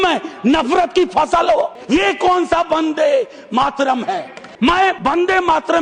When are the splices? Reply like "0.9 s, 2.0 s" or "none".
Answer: 1.8 s, 4.4 s, 5.0 s